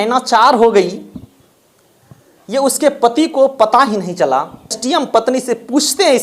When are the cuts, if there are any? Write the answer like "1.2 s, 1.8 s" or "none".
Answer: 4.8 s